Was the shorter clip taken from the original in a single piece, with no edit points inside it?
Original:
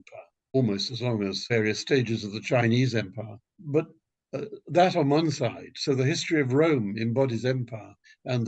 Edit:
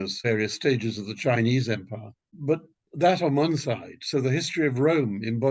no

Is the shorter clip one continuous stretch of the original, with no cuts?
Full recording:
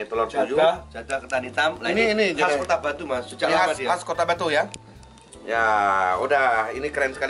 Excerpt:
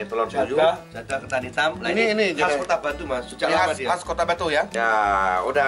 no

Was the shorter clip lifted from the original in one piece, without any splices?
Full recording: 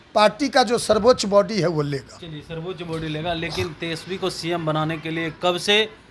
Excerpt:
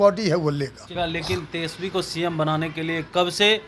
no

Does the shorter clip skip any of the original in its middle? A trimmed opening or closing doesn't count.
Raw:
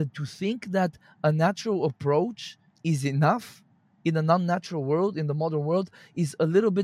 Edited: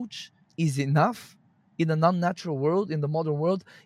no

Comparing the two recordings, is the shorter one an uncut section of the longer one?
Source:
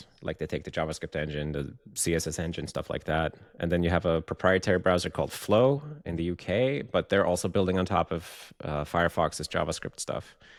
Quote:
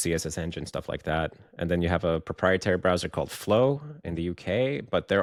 yes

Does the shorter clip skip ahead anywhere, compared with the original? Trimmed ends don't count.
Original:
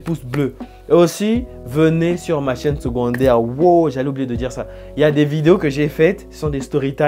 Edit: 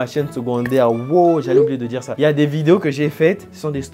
yes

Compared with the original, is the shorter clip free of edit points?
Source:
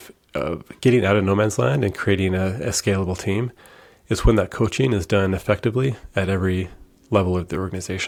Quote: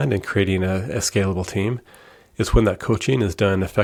yes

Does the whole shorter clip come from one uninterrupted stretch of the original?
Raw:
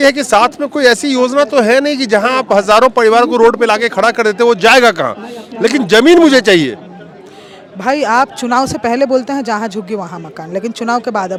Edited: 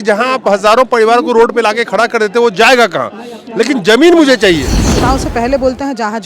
no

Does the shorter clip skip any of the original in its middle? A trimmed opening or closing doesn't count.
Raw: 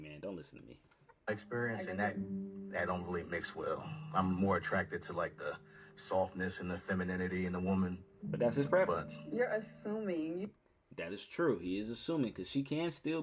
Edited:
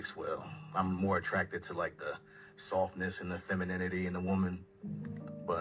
no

